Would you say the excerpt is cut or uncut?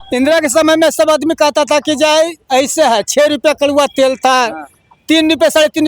uncut